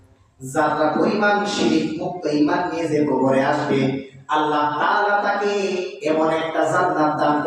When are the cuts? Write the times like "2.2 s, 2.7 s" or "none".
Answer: none